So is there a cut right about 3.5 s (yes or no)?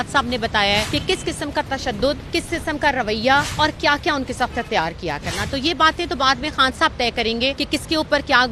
yes